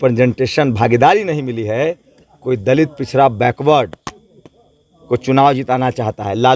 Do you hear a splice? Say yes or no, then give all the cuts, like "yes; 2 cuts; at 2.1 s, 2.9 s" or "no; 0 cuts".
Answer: no; 0 cuts